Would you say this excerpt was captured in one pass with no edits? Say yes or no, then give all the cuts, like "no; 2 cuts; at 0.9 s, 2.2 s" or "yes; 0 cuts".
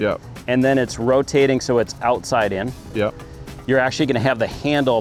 yes; 0 cuts